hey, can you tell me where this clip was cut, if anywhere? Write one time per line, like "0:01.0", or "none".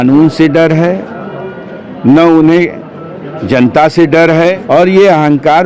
0:04.6